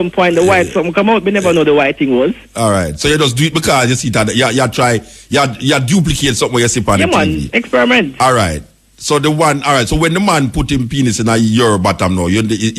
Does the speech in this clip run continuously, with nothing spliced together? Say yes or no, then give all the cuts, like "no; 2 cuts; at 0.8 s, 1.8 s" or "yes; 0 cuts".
yes; 0 cuts